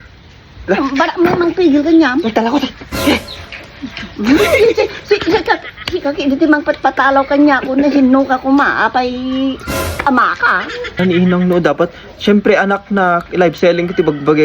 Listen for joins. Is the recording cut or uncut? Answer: cut